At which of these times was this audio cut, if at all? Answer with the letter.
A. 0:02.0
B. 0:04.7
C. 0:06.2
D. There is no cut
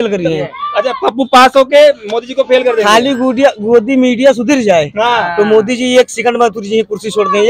D